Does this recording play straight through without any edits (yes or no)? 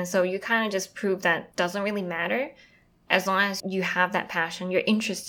no